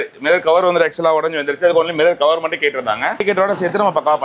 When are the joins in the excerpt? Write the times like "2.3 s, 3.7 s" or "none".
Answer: 3.2 s

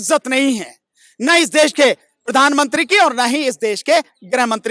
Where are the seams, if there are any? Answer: none

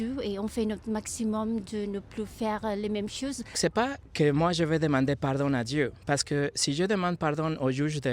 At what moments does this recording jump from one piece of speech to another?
3.6 s

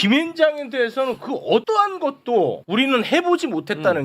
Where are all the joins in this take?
1.6 s, 2.6 s

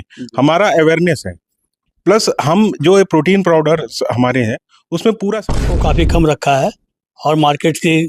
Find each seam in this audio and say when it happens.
5.6 s

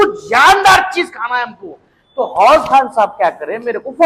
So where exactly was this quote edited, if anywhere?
none

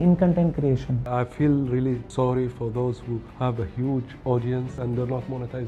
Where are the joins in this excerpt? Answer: 1.0 s, 2.1 s, 3.3 s, 4.7 s

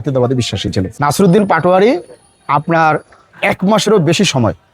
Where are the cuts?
0.9 s

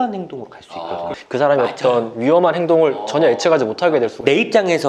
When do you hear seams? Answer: 1.1 s

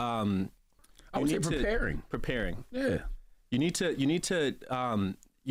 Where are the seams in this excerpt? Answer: none

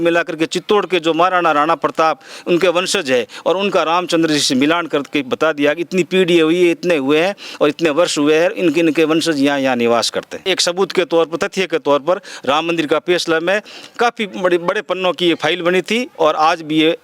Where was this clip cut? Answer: 10.4 s

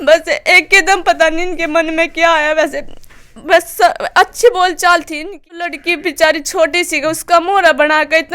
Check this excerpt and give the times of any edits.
5.7 s

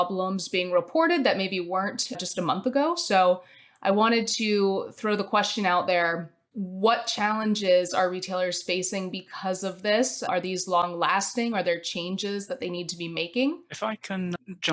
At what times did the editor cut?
2.2 s, 10.2 s

